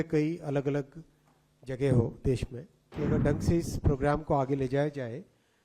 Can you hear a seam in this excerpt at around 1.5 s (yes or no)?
no